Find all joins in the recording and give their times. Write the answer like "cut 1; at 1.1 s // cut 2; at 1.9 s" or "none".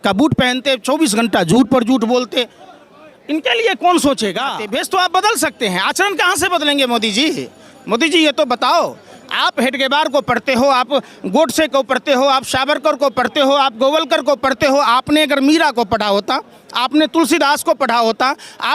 cut 1; at 4.6 s